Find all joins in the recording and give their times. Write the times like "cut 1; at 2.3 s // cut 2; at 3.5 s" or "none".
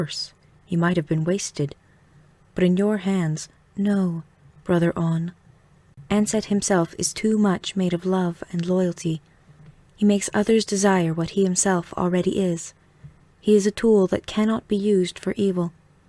cut 1; at 3.3 s